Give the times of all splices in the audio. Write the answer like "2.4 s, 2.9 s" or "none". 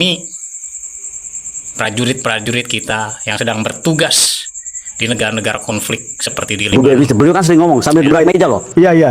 6.7 s